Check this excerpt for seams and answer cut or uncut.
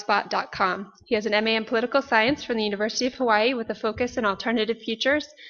uncut